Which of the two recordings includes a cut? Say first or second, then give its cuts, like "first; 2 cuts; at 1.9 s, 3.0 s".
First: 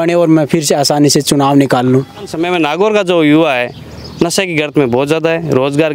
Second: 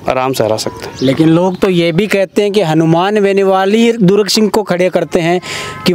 first; 1 cut; at 2.5 s